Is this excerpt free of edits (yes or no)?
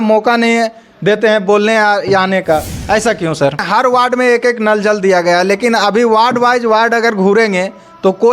no